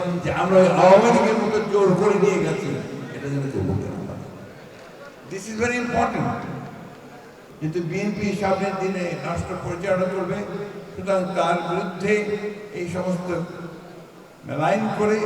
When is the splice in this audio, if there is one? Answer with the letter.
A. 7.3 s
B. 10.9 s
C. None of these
A